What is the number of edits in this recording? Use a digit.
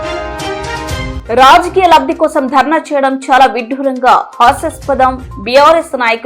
1